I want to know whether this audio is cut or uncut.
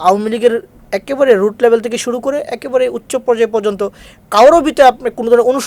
uncut